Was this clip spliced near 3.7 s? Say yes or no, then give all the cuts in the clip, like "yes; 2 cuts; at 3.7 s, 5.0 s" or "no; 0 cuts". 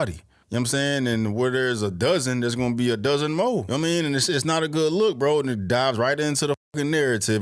yes; 1 cut; at 3.7 s